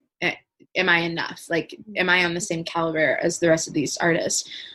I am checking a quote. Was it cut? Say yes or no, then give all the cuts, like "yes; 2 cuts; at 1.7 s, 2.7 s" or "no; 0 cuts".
no; 0 cuts